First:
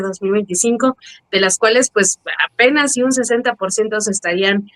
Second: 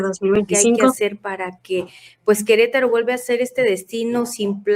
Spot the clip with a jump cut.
second; 1 cut; at 1.0 s

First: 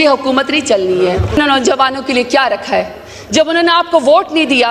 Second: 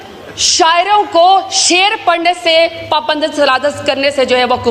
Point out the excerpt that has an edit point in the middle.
first; 1 cut; at 1.4 s

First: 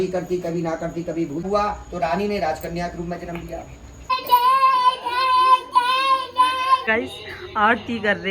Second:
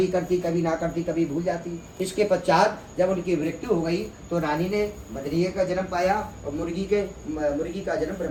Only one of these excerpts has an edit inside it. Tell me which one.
first; 3 cuts; at 1.4 s, 4.0 s, 6.9 s

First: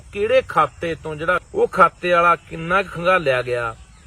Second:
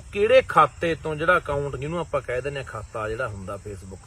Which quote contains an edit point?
first; 1 cut; at 1.4 s

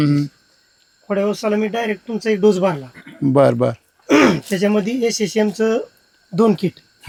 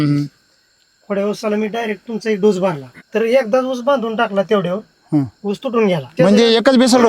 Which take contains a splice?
second; 2 cuts; at 3.1 s, 6.1 s

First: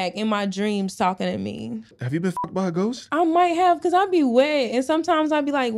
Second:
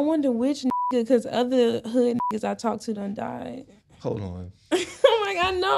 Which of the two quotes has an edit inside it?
first; 1 cut; at 2.0 s

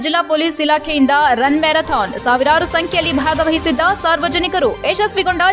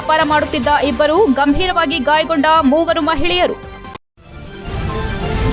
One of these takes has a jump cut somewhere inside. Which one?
second; 1 cut; at 4.0 s

